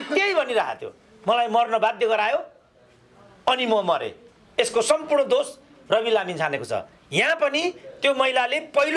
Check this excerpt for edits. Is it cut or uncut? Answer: uncut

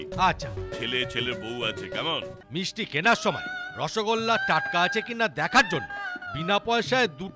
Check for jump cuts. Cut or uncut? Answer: cut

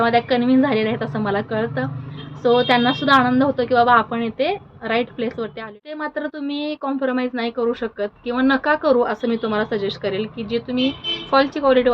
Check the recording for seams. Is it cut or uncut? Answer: cut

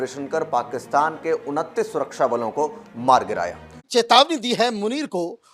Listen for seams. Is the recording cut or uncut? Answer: cut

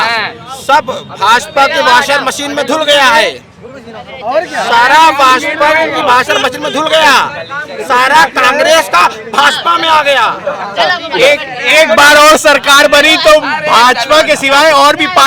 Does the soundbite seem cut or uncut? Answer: uncut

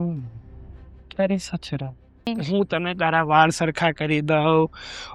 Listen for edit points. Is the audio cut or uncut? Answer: cut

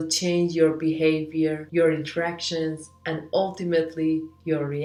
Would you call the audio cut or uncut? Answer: uncut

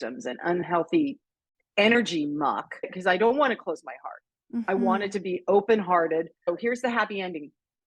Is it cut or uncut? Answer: cut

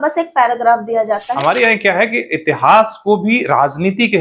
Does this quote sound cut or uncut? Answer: cut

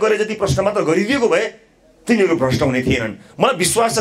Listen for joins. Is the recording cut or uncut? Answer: uncut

